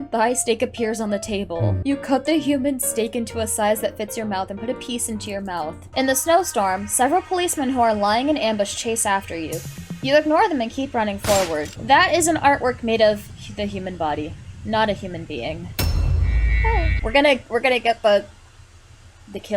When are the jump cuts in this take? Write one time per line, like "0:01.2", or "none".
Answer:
0:01.8
0:05.8
0:11.7
0:16.9